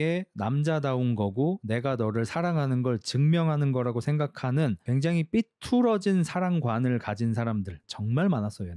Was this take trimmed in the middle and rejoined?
yes; 1 cut; at 7.8 s

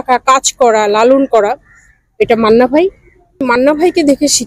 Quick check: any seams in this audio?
yes; 1 cut; at 3.4 s

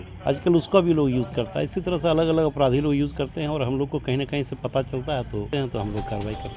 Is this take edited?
yes; 1 cut; at 5.5 s

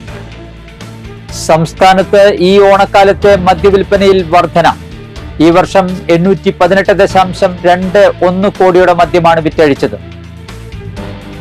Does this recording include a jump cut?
yes; 1 cut; at 1.0 s

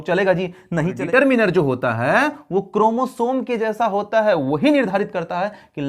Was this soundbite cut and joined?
yes; 1 cut; at 1.0 s

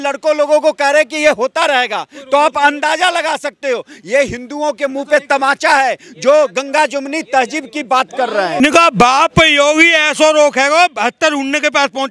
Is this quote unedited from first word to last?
no; 1 cut; at 8.6 s

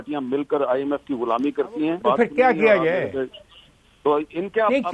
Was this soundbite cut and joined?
yes; 1 cut; at 2.0 s

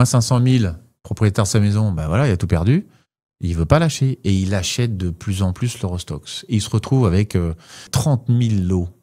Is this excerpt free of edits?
no; 1 cut; at 7.9 s

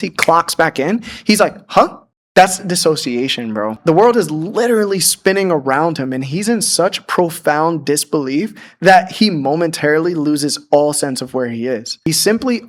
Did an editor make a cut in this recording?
no; 0 cuts

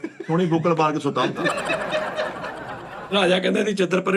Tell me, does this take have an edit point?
yes; 1 cut; at 2.8 s

